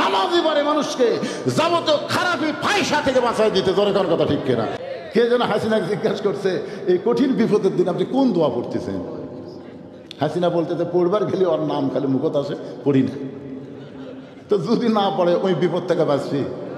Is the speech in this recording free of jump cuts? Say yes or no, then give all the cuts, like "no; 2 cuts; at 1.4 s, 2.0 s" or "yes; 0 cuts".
no; 1 cut; at 4.8 s